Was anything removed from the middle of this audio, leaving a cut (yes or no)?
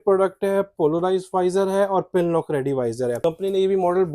yes